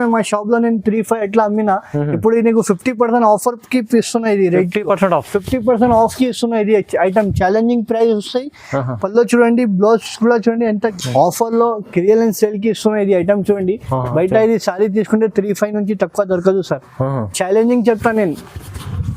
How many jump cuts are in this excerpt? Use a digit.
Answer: 1